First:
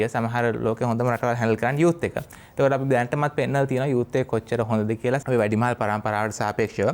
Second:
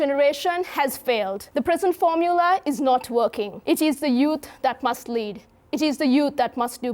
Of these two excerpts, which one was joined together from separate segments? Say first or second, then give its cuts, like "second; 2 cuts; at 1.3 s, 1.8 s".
second; 2 cuts; at 1.4 s, 3.5 s